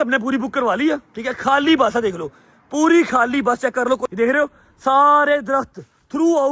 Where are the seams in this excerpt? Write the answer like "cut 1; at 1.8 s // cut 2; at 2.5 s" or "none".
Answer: cut 1; at 4.1 s